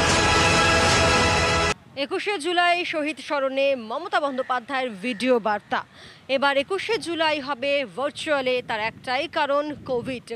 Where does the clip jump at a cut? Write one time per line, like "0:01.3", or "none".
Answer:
0:01.7